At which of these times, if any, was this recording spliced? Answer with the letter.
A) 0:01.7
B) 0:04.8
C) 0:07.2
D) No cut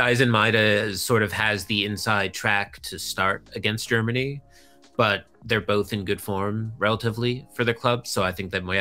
D